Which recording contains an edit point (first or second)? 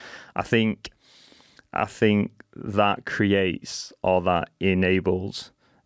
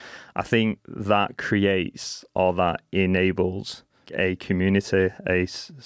second